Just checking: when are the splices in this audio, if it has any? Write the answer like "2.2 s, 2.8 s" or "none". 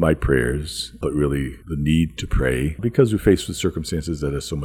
1.0 s, 1.6 s, 2.8 s